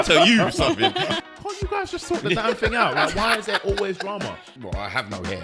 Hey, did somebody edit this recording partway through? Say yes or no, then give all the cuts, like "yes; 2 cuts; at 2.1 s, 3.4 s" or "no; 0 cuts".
yes; 2 cuts; at 1.2 s, 4.5 s